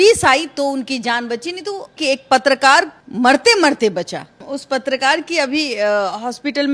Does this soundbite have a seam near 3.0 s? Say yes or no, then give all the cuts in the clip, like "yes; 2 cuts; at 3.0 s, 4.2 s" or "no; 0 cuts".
yes; 3 cuts; at 1.9 s, 3.0 s, 4.4 s